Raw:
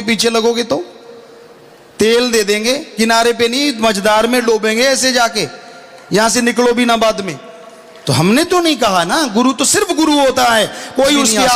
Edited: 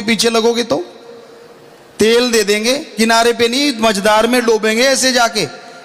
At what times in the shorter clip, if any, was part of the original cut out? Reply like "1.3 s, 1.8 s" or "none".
none

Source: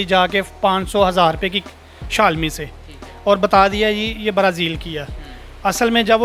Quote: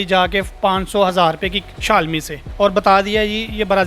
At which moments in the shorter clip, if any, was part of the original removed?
1.7 s, 2.4 s

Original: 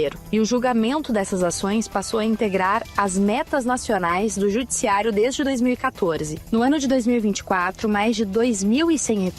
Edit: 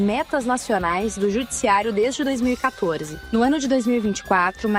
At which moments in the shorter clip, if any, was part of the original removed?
none

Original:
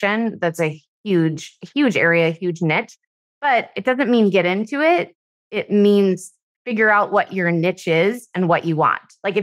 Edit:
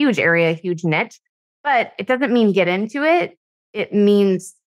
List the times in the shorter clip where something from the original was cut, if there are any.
none

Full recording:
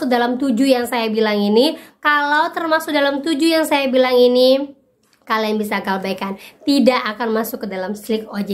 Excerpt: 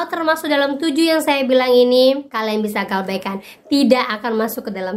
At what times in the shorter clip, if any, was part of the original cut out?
2.3 s

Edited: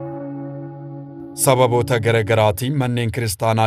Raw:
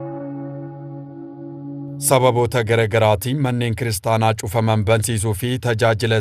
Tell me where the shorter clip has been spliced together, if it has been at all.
1.4 s

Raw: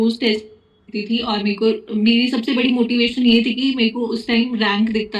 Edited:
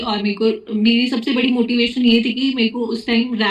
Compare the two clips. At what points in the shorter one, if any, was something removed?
none

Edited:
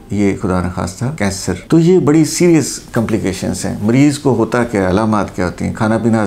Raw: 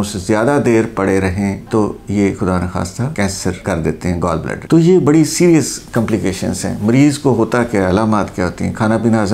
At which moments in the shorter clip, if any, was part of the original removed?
1.6 s

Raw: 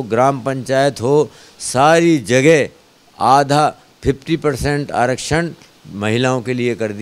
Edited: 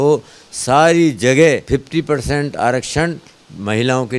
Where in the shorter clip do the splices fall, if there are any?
1.6 s

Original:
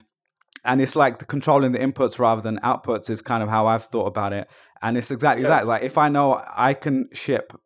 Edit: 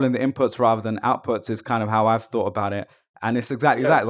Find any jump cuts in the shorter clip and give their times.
none

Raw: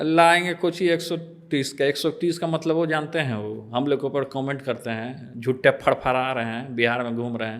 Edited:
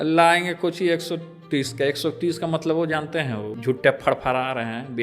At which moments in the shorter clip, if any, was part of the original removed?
3.5 s

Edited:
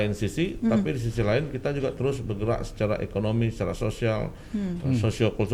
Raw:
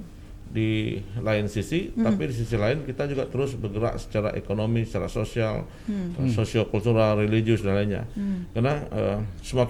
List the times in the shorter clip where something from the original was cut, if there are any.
none

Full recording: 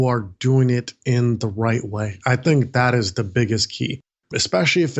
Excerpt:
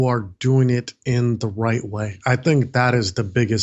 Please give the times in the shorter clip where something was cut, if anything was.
none

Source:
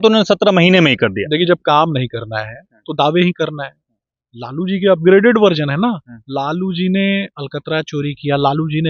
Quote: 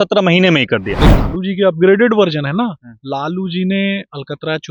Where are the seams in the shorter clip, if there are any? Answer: 1.1 s

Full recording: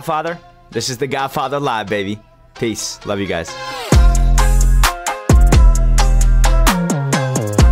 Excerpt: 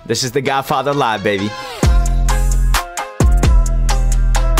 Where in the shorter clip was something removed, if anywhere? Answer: 1.6 s

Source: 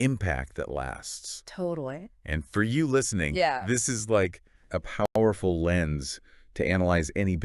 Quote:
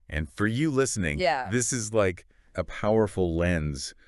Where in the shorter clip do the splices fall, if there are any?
2.9 s

